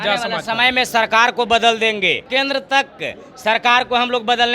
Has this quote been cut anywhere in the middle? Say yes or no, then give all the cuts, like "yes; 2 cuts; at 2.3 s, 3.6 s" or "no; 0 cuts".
yes; 1 cut; at 2.2 s